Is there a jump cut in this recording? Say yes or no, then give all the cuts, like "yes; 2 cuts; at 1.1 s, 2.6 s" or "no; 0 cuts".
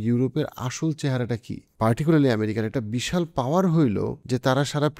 yes; 2 cuts; at 1.6 s, 4.2 s